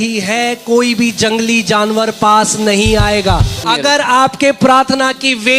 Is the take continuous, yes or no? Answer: no